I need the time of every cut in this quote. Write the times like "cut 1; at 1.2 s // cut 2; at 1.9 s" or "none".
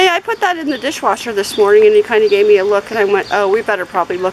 none